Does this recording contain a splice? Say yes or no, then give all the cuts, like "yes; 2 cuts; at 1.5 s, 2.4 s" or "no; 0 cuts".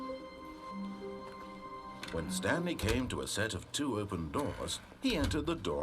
yes; 1 cut; at 2.2 s